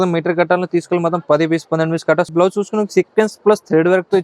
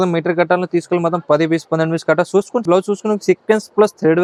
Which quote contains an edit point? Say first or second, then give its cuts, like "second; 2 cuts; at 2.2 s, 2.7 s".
first; 1 cut; at 2.3 s